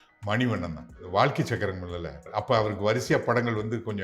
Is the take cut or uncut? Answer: cut